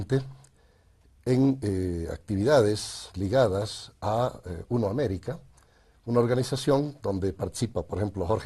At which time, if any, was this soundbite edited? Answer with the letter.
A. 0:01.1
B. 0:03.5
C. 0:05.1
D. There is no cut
B